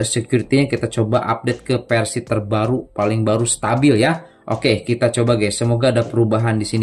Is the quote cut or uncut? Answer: uncut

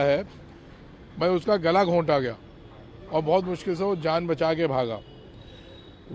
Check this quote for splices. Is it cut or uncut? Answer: uncut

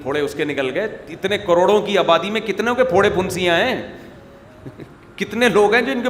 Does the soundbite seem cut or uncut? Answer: uncut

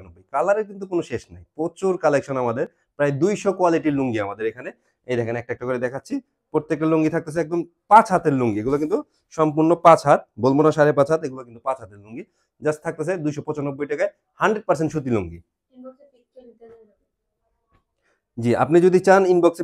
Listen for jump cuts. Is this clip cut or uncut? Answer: uncut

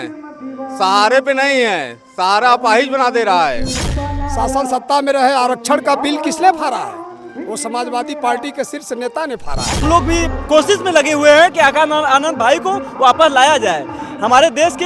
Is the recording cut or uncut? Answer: cut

